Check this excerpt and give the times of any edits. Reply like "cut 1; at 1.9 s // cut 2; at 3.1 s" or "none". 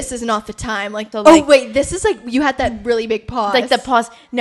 cut 1; at 1.0 s